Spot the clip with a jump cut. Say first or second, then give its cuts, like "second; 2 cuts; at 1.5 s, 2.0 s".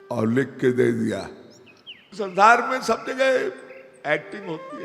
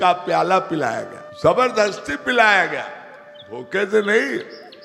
first; 1 cut; at 2.1 s